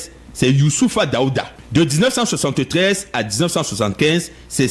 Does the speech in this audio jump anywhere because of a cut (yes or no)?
yes